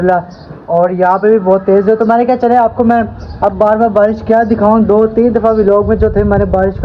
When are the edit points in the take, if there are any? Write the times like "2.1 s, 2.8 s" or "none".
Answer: none